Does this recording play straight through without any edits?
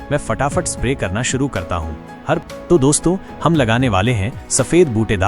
no; 1 cut; at 2.4 s

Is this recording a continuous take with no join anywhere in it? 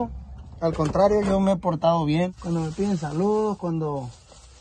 no; 1 cut; at 2.4 s

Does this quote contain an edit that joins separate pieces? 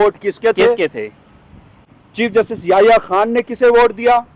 no; 0 cuts

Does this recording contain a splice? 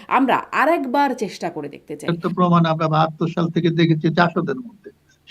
yes; 1 cut; at 2.0 s

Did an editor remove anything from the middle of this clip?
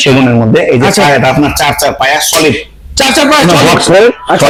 no; 0 cuts

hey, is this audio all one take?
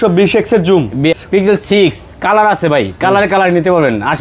no; 1 cut; at 1.1 s

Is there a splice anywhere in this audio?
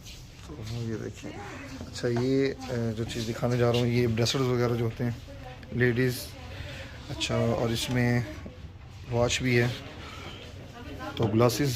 no; 0 cuts

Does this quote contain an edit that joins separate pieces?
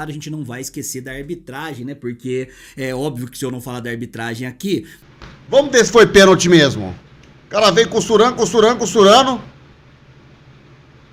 yes; 1 cut; at 5.0 s

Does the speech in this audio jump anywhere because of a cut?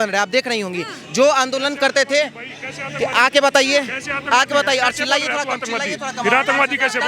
no; 0 cuts

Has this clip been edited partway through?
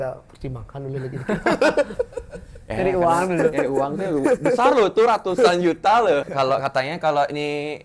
yes; 1 cut; at 6.3 s

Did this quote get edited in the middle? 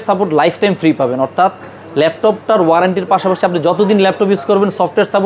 no; 0 cuts

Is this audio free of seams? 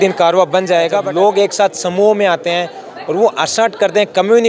no; 1 cut; at 1.0 s

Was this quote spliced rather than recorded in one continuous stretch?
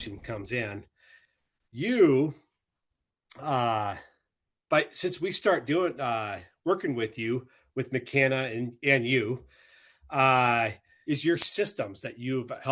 yes; 1 cut; at 10.9 s

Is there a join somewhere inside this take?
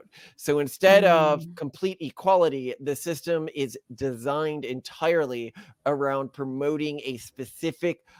no; 0 cuts

